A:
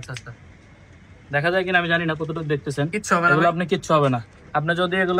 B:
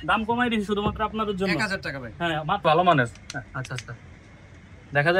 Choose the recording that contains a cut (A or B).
B